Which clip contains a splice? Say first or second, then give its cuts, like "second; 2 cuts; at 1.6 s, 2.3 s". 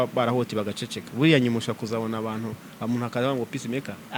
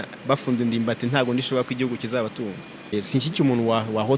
second; 1 cut; at 2.9 s